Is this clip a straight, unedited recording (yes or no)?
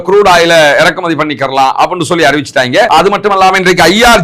no